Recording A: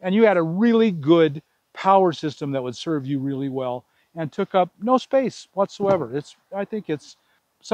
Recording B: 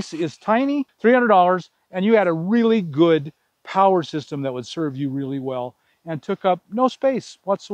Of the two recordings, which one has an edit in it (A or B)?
B